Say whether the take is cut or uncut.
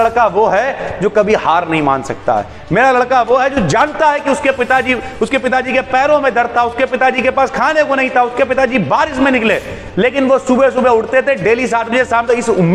uncut